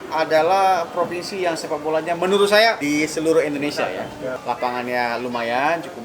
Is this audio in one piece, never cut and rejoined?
no; 2 cuts; at 2.8 s, 4.3 s

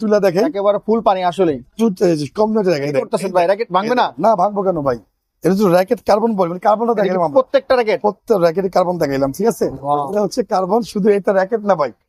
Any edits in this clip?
no; 0 cuts

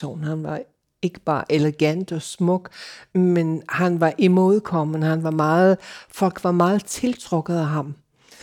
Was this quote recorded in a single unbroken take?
no; 1 cut; at 3.0 s

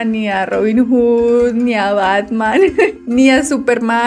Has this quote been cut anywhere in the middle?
no; 0 cuts

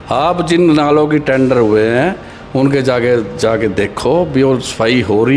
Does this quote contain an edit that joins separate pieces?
no; 0 cuts

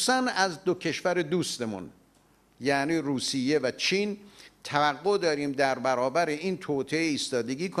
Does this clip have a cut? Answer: no; 0 cuts

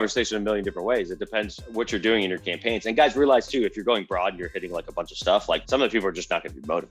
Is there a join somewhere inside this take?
yes; 2 cuts; at 1.6 s, 5.6 s

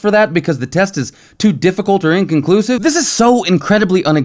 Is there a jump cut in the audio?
yes; 1 cut; at 2.8 s

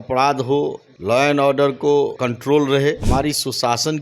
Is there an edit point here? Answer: yes; 3 cuts; at 0.9 s, 2.2 s, 3.0 s

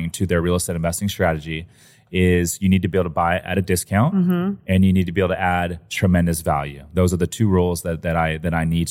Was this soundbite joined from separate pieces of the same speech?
no; 0 cuts

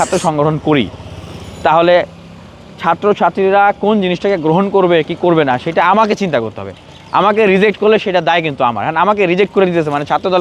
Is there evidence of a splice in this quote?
no; 0 cuts

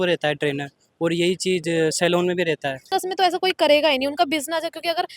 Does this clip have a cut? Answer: yes; 1 cut; at 2.9 s

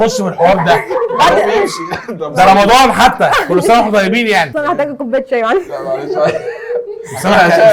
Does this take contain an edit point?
no; 0 cuts

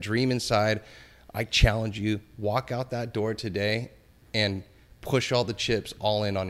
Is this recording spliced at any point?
no; 0 cuts

